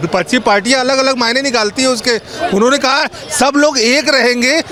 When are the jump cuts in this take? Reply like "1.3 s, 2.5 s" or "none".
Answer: none